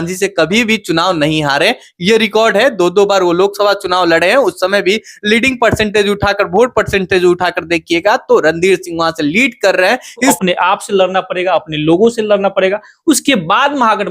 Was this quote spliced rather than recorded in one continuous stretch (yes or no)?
yes